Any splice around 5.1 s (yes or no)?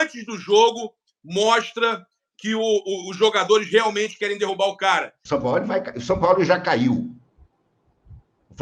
yes